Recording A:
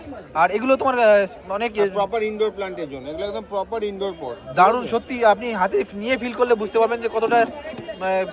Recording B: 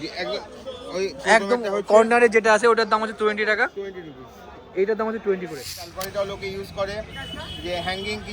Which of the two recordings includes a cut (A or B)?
B